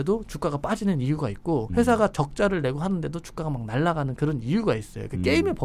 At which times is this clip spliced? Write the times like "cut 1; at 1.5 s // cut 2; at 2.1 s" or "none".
cut 1; at 1.7 s